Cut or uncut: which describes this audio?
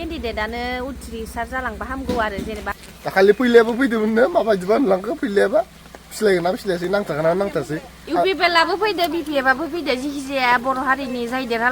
cut